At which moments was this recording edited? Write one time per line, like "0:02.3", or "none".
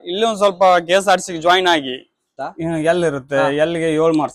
0:02.3